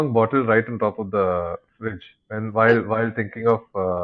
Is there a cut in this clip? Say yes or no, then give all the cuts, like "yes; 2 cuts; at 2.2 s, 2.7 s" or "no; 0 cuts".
no; 0 cuts